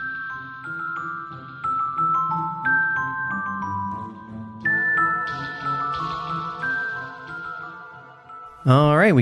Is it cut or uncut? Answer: cut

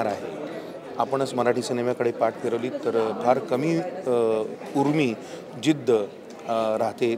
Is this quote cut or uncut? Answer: uncut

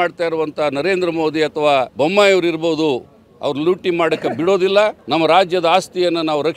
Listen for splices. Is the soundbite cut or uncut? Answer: cut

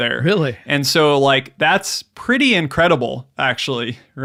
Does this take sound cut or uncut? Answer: uncut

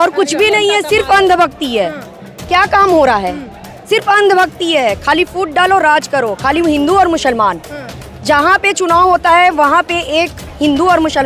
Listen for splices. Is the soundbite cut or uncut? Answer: uncut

